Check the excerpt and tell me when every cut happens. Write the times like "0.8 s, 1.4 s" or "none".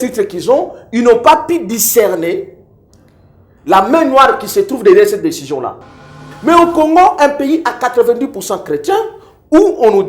6.2 s